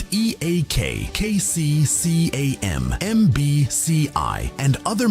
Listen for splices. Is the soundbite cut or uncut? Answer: cut